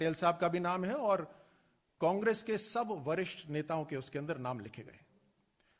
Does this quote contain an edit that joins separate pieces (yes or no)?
yes